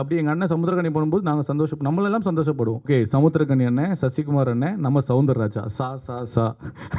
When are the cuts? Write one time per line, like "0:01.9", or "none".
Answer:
0:02.9